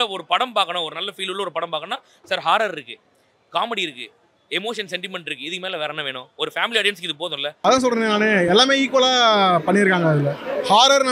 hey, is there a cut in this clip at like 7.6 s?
yes; 1 cut; at 7.6 s

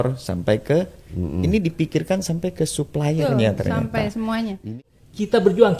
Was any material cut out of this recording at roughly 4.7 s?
yes; 1 cut; at 4.7 s

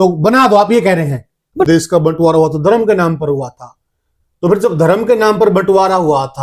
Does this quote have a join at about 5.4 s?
no; 1 cut; at 1.7 s

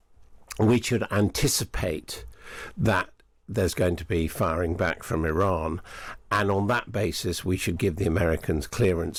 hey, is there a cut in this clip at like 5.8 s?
no; 0 cuts

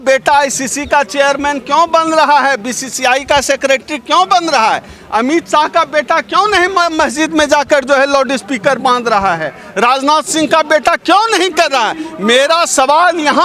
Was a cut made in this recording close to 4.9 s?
no; 0 cuts

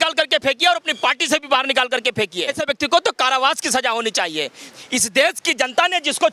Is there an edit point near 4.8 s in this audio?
yes; 2 cuts; at 2.6 s, 4.8 s

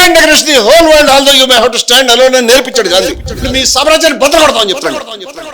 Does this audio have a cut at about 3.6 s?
yes; 1 cut; at 3.6 s

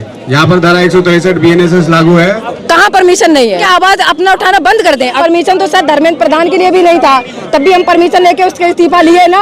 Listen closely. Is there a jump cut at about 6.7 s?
no; 3 cuts; at 2.5 s, 3.6 s, 5.2 s

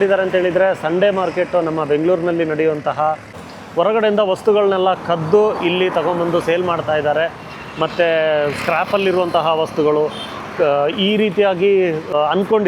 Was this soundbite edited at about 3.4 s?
yes; 1 cut; at 3.4 s

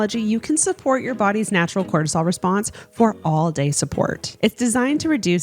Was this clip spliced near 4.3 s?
yes; 1 cut; at 4.3 s

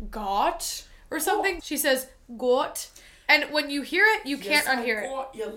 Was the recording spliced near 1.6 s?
yes; 1 cut; at 1.6 s

